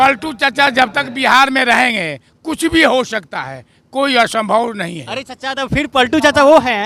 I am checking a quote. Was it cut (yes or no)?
no